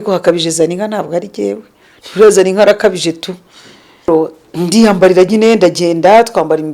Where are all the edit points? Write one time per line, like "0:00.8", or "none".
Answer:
0:04.1